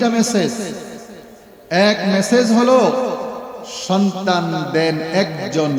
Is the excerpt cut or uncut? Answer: uncut